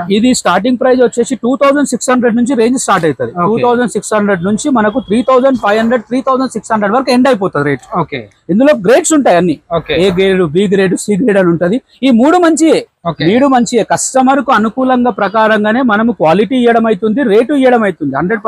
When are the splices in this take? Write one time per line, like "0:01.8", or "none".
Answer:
none